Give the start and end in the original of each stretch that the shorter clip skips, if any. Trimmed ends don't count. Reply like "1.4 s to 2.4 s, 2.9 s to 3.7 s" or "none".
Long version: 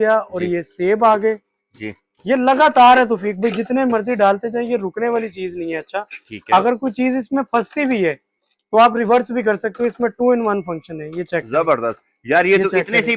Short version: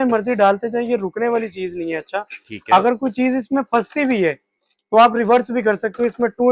none